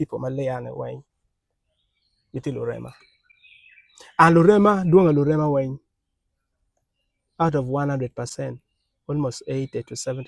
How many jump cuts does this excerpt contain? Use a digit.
0